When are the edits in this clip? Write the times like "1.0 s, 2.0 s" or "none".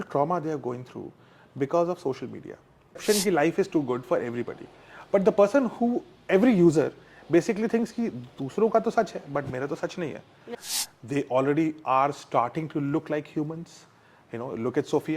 3.0 s, 10.5 s